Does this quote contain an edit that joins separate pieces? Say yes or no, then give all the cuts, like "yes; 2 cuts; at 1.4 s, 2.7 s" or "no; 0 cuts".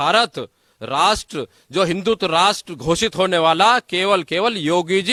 no; 0 cuts